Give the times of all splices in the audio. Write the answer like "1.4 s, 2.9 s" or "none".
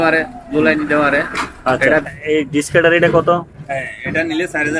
2.1 s